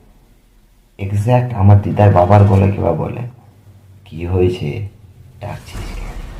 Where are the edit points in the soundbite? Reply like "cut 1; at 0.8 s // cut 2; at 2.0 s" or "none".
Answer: none